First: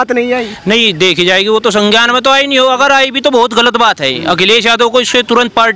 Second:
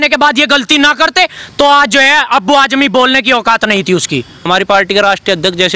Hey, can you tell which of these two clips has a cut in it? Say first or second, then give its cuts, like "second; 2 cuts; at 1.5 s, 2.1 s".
second; 1 cut; at 4.5 s